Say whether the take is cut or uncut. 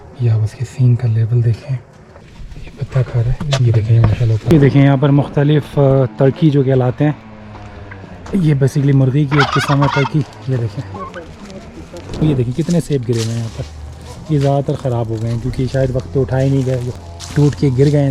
cut